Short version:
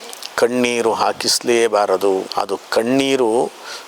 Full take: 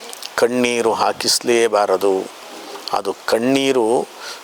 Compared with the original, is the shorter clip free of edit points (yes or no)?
no